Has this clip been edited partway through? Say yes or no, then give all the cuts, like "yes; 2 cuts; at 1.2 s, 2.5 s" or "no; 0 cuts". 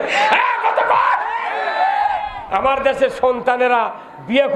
yes; 1 cut; at 2.3 s